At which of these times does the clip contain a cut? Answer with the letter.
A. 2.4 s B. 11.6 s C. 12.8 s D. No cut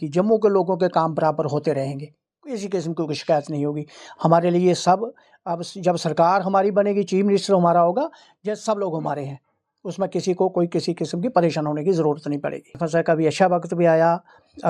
C